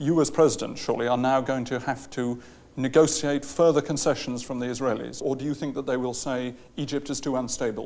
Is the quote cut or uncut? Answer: cut